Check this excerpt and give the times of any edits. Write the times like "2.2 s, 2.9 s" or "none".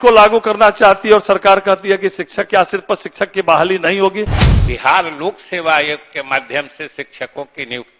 4.3 s